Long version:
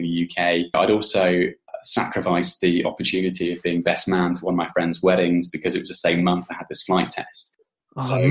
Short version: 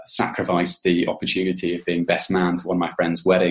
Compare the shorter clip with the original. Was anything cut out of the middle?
no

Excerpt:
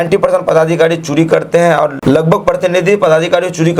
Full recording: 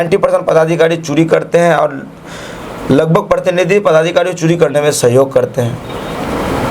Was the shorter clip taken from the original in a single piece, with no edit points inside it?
no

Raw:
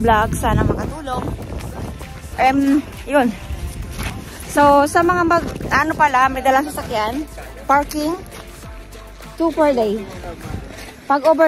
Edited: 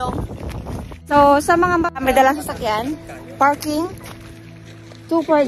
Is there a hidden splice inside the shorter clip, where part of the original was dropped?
yes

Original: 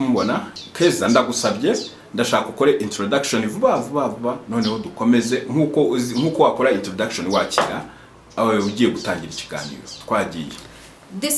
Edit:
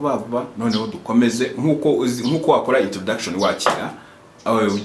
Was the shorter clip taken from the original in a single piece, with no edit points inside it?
yes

